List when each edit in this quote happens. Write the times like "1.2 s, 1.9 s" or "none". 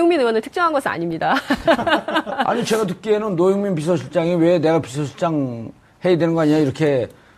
3.4 s